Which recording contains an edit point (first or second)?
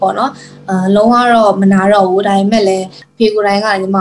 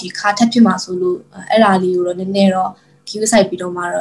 first